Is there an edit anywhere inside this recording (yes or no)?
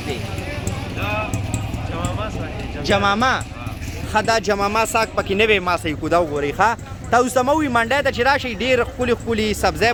no